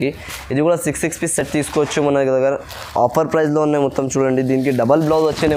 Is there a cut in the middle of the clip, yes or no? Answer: no